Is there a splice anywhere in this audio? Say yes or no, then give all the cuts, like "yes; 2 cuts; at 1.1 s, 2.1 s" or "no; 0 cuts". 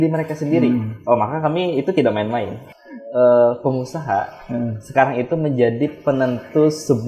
yes; 1 cut; at 2.6 s